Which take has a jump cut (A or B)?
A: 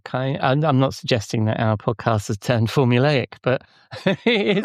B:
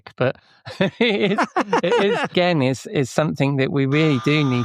B